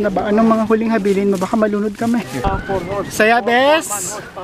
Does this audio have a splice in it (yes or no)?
yes